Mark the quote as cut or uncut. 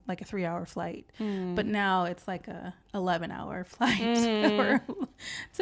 uncut